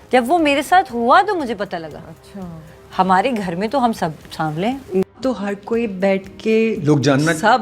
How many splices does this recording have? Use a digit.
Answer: 1